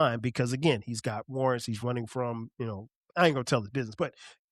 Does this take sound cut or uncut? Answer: cut